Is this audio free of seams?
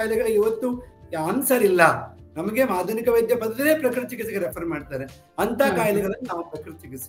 yes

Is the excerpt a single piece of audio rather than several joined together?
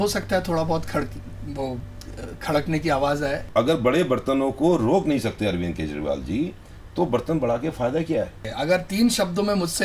no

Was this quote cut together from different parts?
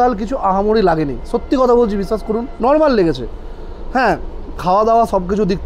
yes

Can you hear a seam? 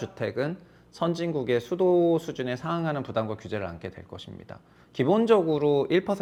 no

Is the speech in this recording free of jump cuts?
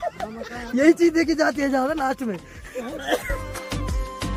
yes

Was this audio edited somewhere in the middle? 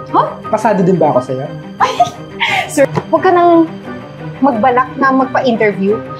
yes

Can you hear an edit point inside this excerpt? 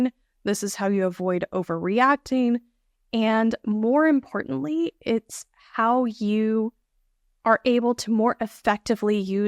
no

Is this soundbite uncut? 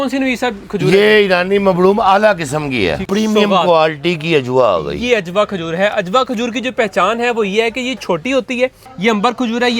no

